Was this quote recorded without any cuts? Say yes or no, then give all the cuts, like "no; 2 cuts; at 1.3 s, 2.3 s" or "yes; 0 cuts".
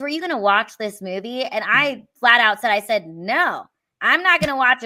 yes; 0 cuts